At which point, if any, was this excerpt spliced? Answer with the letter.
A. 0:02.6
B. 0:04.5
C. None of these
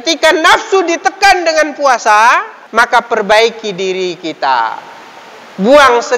A